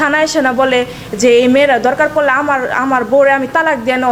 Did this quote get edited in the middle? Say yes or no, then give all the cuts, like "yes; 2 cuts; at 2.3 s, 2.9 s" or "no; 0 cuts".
no; 0 cuts